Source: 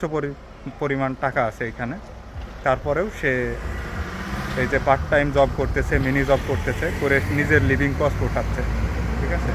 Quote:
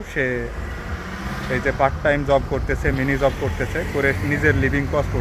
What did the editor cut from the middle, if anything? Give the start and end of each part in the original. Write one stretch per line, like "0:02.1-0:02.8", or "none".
none